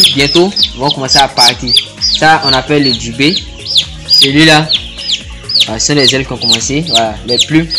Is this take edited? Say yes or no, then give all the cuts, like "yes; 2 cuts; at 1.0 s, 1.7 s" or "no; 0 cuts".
no; 0 cuts